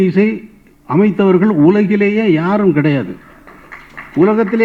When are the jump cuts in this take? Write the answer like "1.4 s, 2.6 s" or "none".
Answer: none